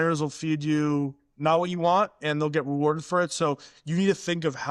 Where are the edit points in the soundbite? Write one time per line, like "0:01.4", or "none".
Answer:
none